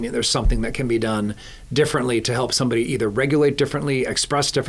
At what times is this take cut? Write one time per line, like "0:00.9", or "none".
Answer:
none